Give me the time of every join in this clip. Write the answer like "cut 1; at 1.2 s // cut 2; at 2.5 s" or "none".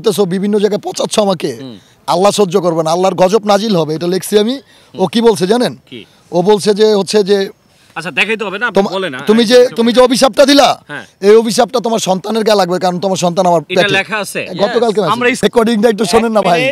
cut 1; at 15.4 s